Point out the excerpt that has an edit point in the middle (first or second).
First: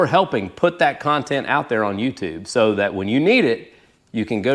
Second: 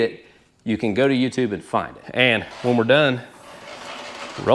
second